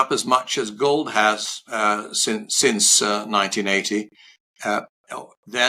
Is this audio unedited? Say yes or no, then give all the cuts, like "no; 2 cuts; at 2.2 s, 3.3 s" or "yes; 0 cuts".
yes; 0 cuts